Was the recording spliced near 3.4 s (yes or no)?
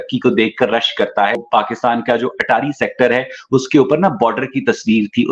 no